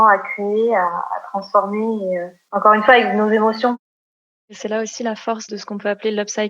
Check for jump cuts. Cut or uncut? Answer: cut